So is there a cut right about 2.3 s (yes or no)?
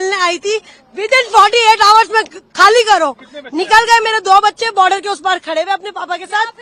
no